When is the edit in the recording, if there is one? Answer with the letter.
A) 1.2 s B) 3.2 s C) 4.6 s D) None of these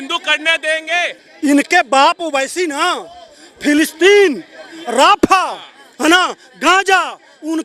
A